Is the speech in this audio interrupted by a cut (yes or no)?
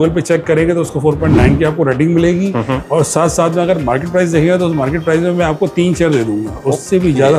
no